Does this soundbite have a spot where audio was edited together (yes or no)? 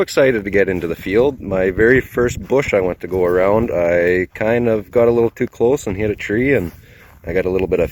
no